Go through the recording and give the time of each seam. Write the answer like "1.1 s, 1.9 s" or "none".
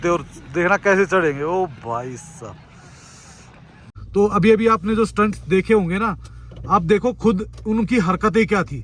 3.8 s